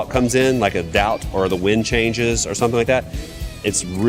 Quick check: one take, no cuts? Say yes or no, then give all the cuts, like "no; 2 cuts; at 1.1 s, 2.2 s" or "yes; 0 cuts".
yes; 0 cuts